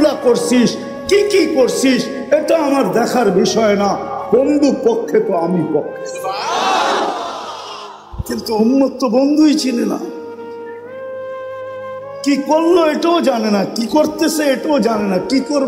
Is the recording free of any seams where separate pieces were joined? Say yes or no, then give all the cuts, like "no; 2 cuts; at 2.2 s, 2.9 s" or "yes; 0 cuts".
no; 2 cuts; at 10.2 s, 12.0 s